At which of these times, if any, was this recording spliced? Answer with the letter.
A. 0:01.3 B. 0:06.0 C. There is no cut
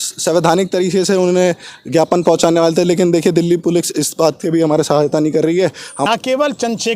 B